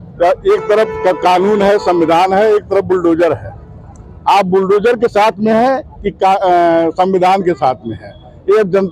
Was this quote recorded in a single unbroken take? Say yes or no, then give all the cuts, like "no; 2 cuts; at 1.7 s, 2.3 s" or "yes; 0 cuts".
yes; 0 cuts